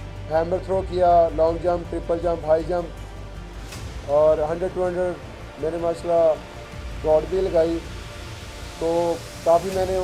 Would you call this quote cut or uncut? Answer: uncut